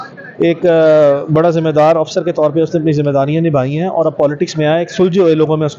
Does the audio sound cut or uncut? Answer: uncut